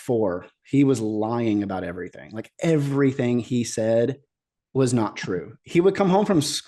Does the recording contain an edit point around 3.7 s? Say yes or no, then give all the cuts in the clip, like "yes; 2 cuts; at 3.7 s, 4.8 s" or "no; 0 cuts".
no; 1 cut; at 5.4 s